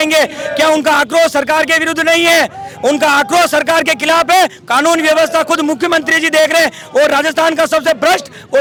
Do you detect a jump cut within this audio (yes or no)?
no